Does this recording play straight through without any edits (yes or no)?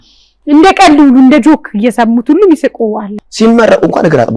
no